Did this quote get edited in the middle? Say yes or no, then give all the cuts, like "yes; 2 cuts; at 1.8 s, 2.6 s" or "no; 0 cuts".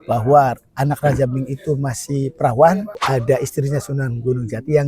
yes; 1 cut; at 3.0 s